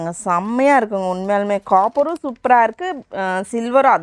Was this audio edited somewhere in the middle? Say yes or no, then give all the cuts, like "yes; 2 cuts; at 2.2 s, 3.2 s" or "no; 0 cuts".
no; 0 cuts